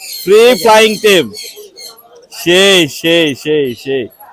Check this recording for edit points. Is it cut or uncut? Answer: uncut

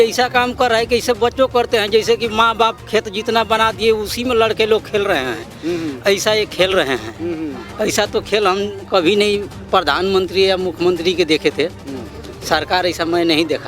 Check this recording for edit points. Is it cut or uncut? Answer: uncut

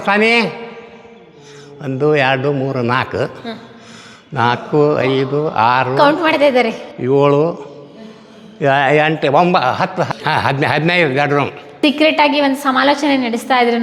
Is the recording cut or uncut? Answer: cut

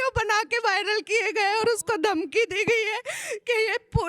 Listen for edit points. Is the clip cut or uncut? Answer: uncut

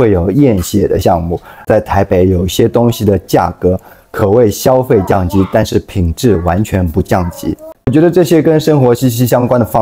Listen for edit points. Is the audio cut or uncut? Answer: cut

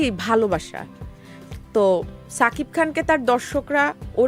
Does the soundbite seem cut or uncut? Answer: uncut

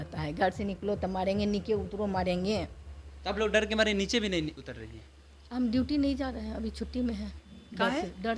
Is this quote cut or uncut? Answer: uncut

